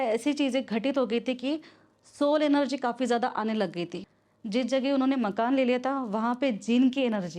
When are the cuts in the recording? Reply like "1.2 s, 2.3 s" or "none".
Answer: 4.0 s